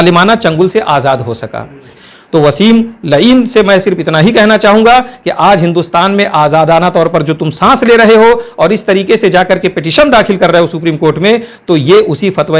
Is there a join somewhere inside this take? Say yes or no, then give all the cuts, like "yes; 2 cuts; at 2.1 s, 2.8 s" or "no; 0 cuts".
yes; 1 cut; at 2.0 s